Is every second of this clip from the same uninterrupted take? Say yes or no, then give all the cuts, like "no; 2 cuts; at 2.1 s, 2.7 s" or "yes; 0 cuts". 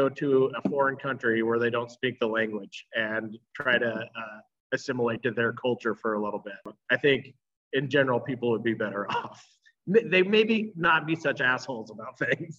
yes; 0 cuts